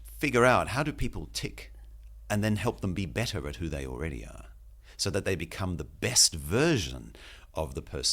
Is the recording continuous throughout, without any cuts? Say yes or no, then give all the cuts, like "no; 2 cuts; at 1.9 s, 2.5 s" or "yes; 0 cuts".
yes; 0 cuts